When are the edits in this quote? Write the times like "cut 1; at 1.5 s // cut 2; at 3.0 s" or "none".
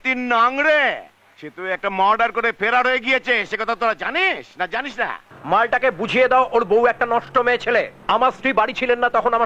cut 1; at 5.3 s // cut 2; at 8.0 s